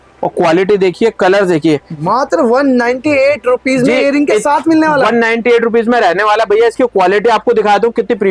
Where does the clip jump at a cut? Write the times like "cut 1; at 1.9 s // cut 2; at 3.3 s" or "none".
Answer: cut 1; at 1.9 s